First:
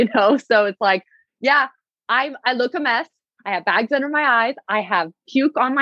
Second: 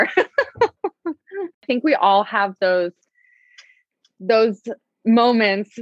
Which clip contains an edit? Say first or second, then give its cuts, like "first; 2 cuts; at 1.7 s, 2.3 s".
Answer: second; 1 cut; at 1.6 s